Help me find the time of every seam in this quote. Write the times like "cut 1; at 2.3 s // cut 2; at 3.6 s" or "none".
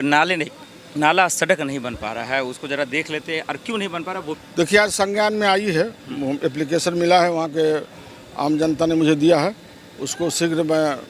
cut 1; at 4.4 s

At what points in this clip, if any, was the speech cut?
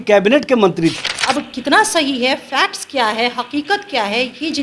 cut 1; at 1.0 s

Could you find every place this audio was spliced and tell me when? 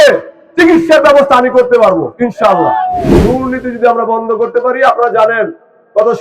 cut 1; at 3.1 s

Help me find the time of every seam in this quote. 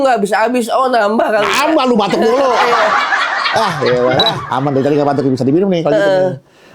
cut 1; at 4.4 s

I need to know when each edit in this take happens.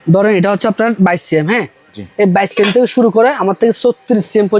none

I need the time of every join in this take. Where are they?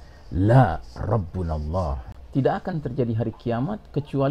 cut 1; at 2.0 s

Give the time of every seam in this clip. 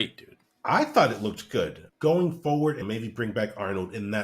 cut 1; at 1.8 s // cut 2; at 2.8 s

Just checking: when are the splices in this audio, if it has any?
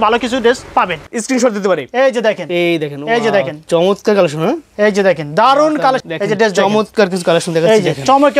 cut 1; at 1.1 s // cut 2; at 6.0 s

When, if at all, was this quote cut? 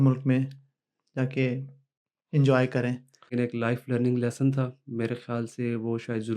cut 1; at 3.3 s

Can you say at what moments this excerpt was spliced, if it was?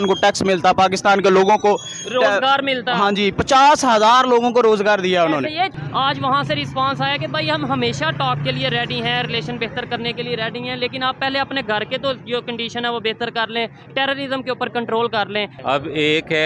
cut 1; at 5.7 s // cut 2; at 15.6 s

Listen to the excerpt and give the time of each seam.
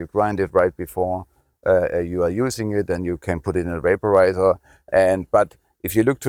none

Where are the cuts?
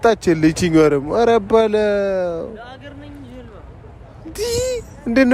none

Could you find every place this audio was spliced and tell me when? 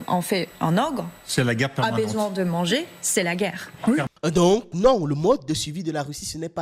cut 1; at 4.1 s

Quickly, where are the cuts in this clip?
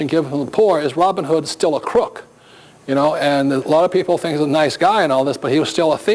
cut 1; at 3.4 s

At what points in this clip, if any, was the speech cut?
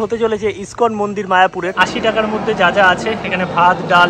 cut 1; at 1.7 s

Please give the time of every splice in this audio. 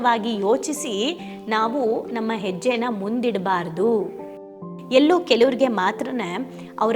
cut 1; at 4.7 s

